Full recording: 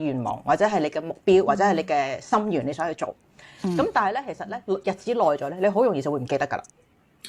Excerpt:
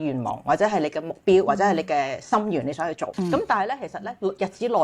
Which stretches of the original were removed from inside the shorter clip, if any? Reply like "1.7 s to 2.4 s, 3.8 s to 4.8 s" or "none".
3.1 s to 3.5 s